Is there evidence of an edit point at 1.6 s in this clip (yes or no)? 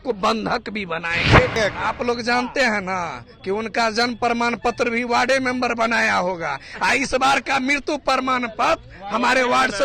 yes